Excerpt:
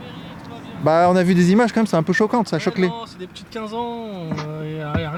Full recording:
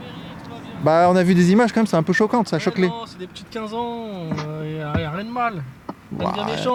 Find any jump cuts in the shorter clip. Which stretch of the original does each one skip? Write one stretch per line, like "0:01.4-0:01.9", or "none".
none